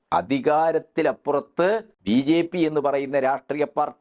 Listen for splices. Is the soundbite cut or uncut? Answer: cut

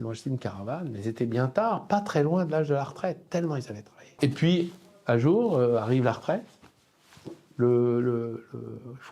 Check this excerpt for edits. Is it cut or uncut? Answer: cut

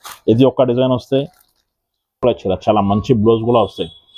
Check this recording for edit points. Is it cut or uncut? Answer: cut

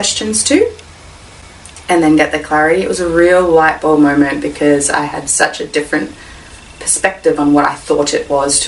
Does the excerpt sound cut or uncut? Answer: uncut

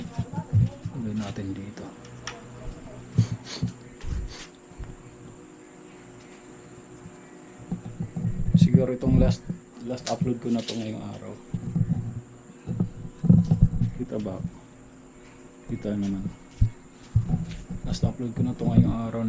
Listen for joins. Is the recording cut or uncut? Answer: uncut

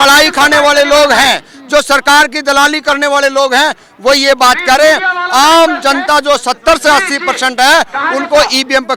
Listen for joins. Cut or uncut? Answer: uncut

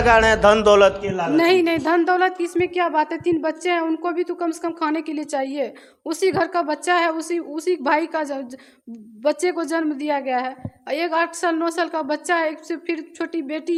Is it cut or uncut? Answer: uncut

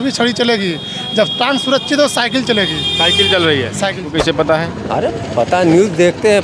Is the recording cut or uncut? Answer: cut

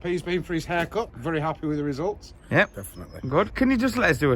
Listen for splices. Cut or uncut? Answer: cut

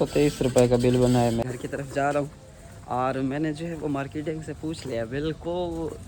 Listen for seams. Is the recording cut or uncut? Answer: cut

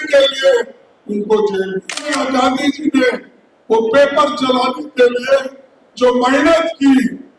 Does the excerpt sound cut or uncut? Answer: cut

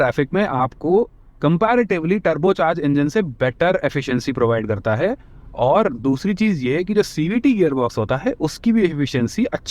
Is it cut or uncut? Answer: uncut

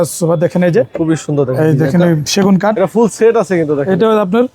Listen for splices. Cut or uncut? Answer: cut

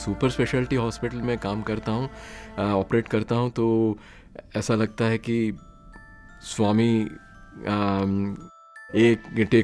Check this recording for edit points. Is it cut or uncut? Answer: uncut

